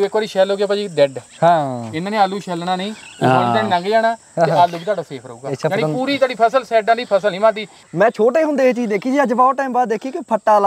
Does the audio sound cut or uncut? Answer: cut